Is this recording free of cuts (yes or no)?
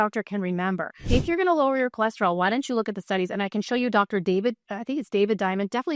no